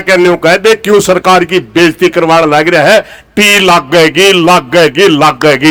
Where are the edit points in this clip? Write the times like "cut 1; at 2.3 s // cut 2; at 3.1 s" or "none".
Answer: none